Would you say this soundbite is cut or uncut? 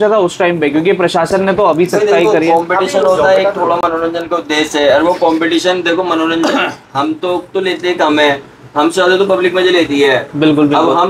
uncut